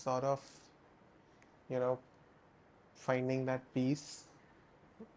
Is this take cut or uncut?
uncut